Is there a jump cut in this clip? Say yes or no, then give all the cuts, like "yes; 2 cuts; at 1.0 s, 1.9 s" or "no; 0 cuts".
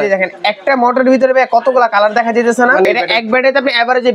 yes; 1 cut; at 2.9 s